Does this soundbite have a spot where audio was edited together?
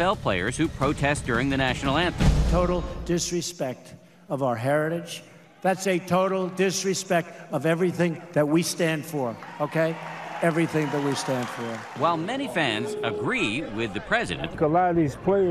yes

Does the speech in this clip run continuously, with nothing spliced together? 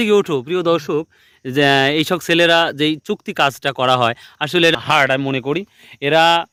yes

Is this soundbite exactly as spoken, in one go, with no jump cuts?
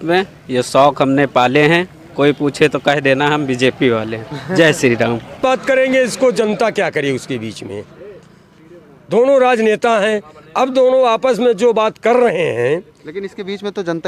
no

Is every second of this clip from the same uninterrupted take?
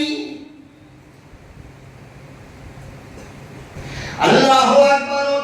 no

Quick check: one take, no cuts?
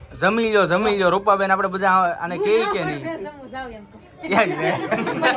yes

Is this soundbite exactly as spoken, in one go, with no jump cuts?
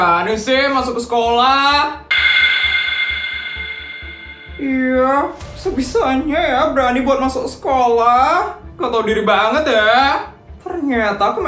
no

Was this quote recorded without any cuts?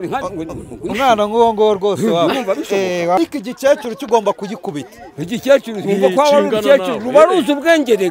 no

